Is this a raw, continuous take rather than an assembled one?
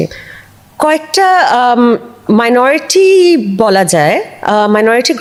yes; 0 cuts

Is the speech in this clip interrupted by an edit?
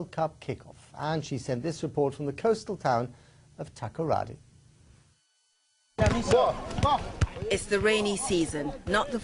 yes; 1 cut; at 5.7 s

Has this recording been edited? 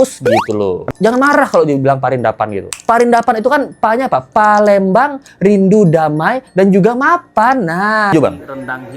yes; 2 cuts; at 0.9 s, 8.1 s

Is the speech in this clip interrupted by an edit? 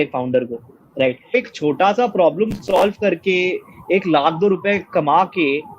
yes; 1 cut; at 1.3 s

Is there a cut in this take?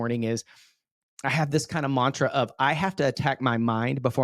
no; 0 cuts

